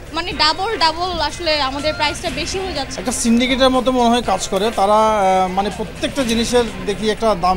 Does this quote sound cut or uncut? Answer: cut